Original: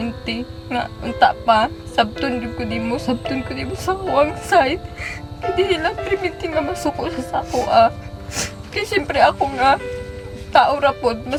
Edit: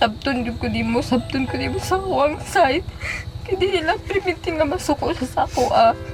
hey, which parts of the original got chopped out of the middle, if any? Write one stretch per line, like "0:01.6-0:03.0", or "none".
none